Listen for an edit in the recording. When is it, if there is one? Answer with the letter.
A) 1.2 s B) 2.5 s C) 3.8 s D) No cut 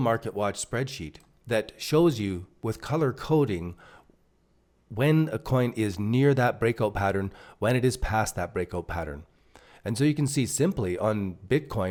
D